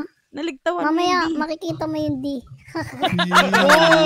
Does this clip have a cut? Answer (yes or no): yes